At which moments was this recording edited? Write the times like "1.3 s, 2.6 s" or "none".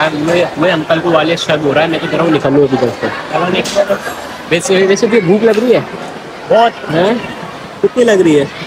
none